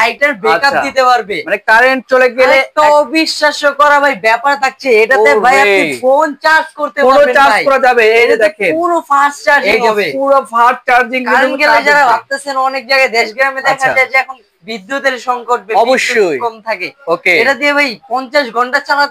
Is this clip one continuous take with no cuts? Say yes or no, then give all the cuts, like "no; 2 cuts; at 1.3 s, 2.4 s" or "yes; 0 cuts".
yes; 0 cuts